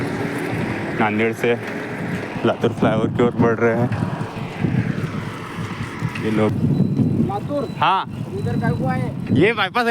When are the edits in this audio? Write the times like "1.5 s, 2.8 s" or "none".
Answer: 6.5 s